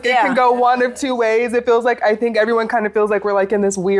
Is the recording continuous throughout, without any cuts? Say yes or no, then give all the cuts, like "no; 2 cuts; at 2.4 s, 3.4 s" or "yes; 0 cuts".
yes; 0 cuts